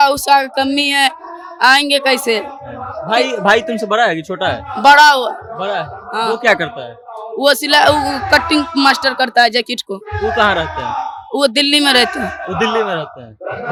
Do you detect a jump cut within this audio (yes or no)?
no